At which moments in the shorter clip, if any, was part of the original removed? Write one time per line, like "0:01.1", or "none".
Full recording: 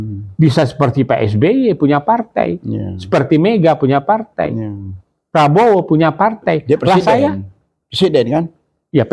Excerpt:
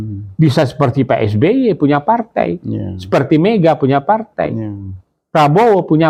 none